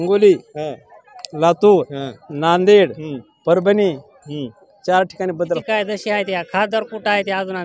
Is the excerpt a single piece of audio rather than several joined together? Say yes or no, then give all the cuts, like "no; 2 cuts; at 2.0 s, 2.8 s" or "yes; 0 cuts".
no; 1 cut; at 5.6 s